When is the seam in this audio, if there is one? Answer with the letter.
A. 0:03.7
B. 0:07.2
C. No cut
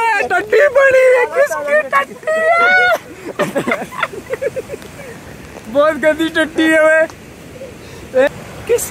C